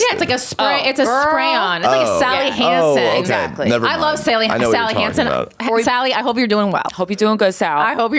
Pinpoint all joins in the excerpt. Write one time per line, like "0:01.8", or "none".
none